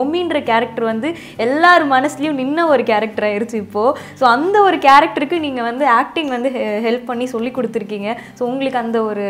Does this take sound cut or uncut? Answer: uncut